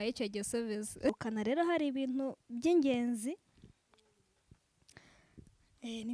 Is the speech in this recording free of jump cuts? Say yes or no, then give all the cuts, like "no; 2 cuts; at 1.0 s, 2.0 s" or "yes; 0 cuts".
no; 1 cut; at 1.1 s